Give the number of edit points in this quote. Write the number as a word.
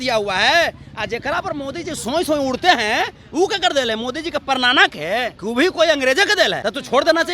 two